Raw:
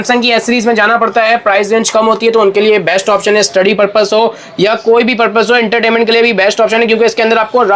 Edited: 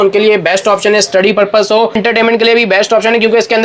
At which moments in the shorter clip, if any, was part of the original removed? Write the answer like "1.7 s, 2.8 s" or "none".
2.0 s

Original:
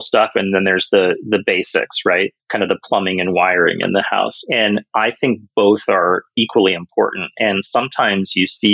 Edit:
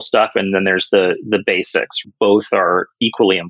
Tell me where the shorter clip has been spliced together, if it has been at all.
2.0 s

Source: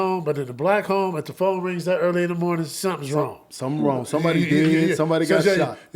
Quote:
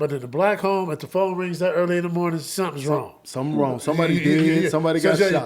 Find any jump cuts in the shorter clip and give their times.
none

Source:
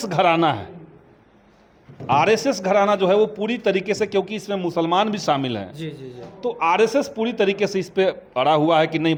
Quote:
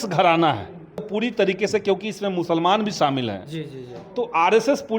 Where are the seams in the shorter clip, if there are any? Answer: 1.1 s

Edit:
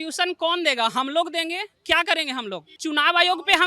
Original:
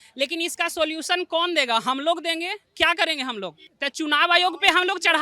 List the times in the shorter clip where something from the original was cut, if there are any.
2.7 s

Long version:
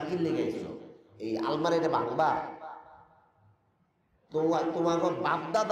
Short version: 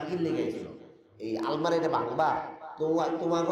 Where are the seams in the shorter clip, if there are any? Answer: 2.6 s

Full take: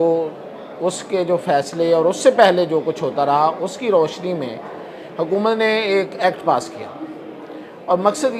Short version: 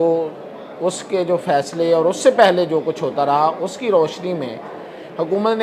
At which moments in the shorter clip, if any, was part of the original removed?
none

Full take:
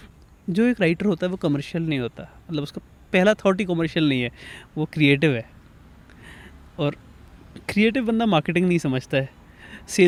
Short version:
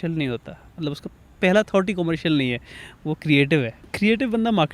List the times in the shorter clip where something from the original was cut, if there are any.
3.8 s

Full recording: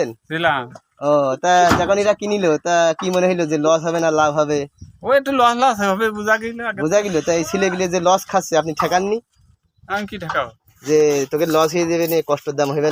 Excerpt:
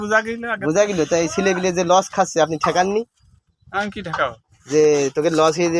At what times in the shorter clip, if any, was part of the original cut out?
none

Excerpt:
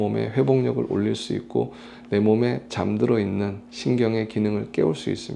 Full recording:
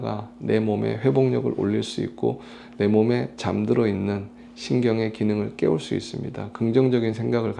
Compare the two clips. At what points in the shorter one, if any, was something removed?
3.6 s

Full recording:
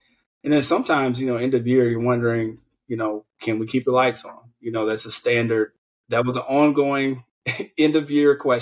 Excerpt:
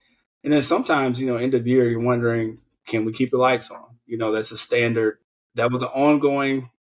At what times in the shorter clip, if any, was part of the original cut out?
2.7 s

